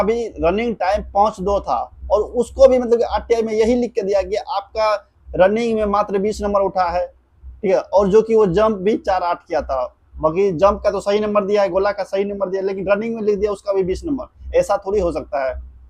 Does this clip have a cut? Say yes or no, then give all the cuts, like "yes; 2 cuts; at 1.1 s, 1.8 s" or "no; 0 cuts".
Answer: no; 0 cuts